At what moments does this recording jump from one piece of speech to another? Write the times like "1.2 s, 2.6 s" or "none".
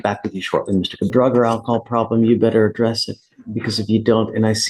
1.1 s